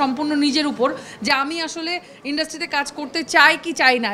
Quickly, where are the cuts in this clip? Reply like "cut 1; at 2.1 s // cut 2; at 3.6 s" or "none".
none

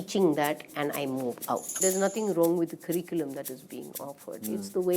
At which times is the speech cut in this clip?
cut 1; at 1.8 s

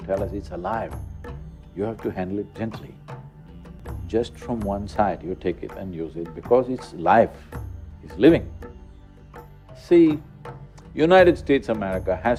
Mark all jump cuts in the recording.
none

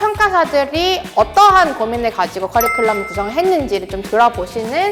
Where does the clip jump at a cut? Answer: none

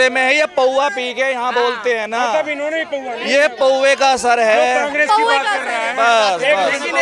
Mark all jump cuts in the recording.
none

